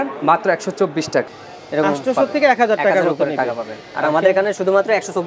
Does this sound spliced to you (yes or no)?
yes